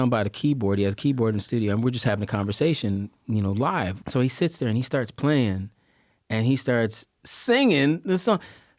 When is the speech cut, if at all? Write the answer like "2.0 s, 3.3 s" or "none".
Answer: 4.0 s

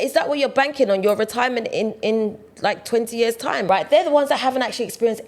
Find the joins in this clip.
3.6 s

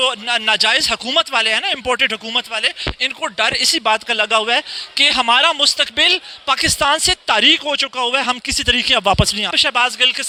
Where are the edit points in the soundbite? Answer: none

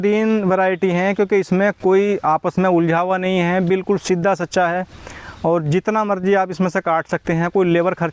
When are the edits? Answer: none

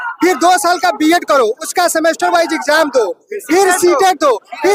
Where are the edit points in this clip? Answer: none

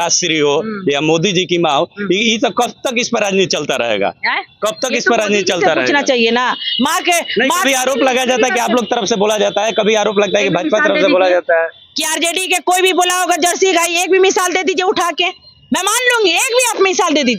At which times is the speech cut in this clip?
none

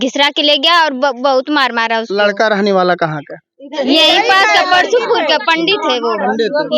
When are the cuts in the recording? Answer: none

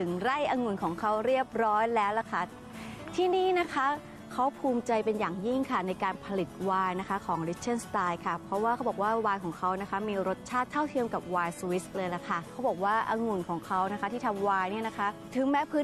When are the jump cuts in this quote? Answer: none

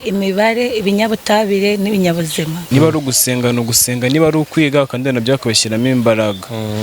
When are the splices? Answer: 2.6 s

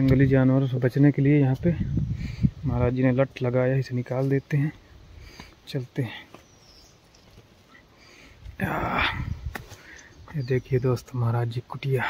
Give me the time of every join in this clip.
none

